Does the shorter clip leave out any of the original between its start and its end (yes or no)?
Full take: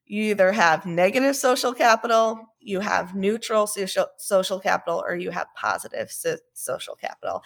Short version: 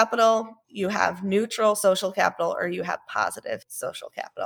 yes